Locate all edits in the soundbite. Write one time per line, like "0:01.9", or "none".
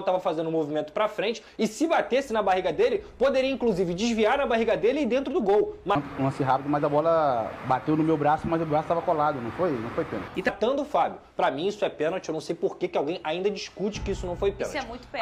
0:05.9
0:10.5